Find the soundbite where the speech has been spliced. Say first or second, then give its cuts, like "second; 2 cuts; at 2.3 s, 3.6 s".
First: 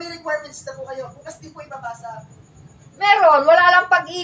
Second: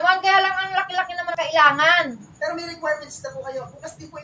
second; 1 cut; at 1.3 s